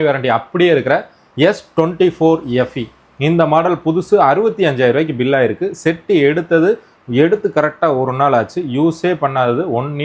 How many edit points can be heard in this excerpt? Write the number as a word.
zero